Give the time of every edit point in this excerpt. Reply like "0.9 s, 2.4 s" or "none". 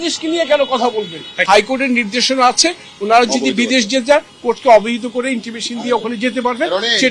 none